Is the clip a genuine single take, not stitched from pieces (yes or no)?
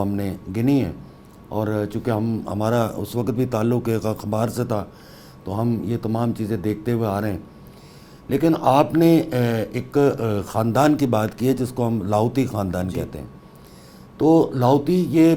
yes